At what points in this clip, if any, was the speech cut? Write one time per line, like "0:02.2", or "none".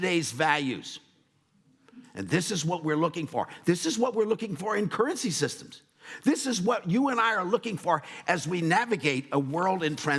none

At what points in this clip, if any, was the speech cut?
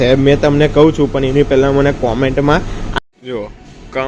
0:02.8

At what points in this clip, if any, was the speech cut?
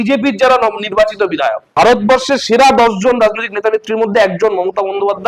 0:01.7

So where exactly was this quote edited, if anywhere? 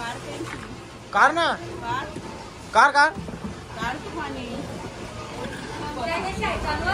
none

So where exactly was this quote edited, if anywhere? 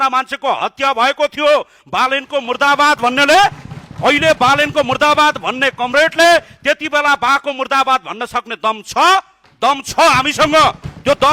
none

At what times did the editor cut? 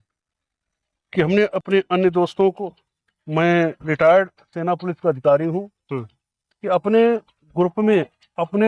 none

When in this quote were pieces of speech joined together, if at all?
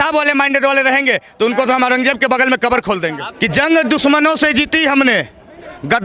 0:03.2

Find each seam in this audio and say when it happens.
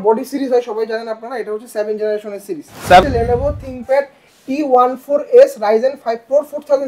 0:03.0

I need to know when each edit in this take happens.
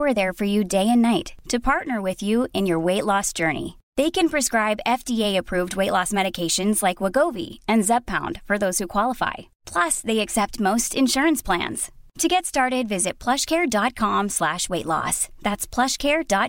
none

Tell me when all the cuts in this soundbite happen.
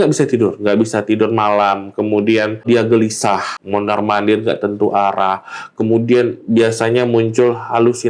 0:02.6
0:03.5

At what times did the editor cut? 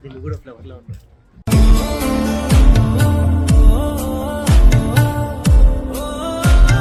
none

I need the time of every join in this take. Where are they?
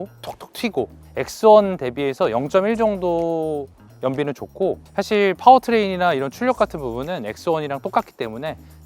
0:01.0

